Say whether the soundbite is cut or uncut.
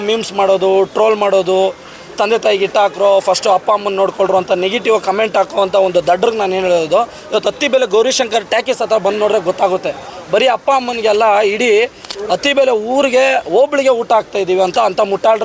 uncut